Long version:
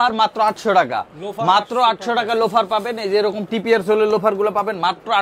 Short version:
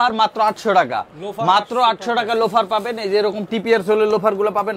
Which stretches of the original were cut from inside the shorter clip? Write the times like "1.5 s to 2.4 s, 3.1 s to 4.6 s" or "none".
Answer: none